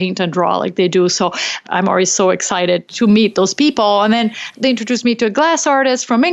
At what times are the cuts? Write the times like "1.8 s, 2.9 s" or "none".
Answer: 1.6 s, 2.9 s, 4.5 s